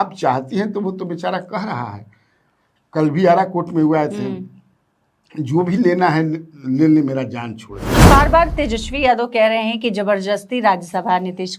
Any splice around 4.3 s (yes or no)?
no